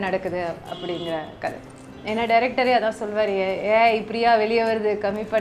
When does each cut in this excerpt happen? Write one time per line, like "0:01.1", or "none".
0:01.9